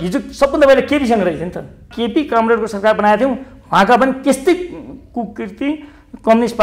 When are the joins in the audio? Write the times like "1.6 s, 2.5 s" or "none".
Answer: 1.9 s